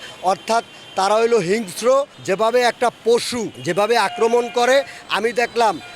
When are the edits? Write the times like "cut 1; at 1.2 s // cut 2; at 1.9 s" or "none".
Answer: cut 1; at 2.2 s // cut 2; at 3.5 s